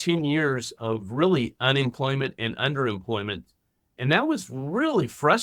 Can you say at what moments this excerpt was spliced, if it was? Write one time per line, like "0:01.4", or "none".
none